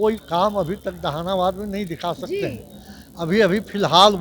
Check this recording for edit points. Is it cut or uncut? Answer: uncut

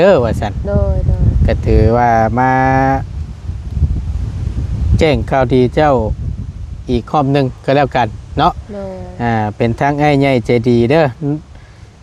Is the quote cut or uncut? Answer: uncut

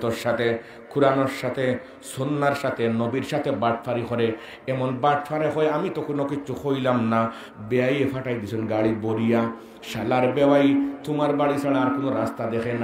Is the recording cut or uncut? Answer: uncut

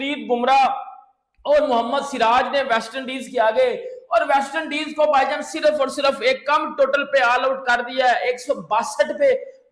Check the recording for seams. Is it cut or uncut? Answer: uncut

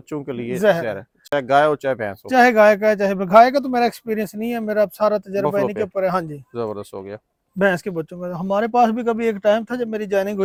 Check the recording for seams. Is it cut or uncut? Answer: uncut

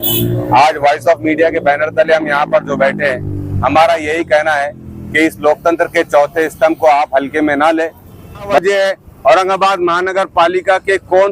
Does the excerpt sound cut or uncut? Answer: cut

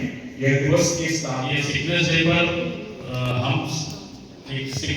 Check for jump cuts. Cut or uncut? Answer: cut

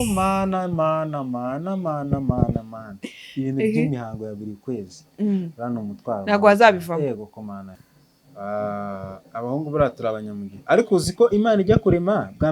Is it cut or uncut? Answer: cut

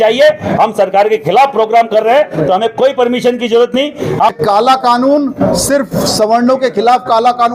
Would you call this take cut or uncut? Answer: cut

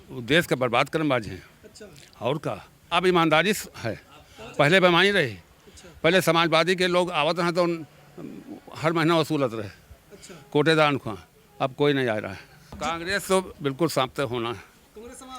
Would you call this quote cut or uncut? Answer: cut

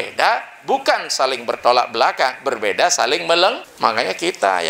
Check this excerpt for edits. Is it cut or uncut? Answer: cut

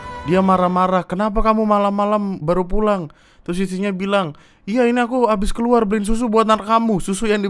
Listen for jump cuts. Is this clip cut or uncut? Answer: uncut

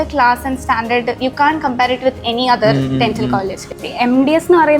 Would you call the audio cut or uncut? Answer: cut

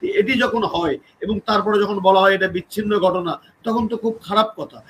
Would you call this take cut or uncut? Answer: uncut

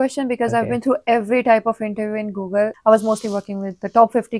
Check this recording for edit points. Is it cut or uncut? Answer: cut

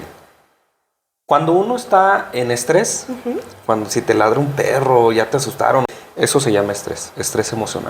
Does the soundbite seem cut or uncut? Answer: cut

